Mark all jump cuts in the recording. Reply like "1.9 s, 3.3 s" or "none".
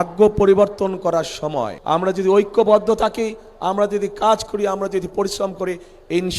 1.7 s

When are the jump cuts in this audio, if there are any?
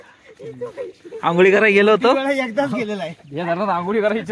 none

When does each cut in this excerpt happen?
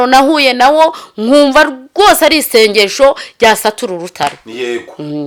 none

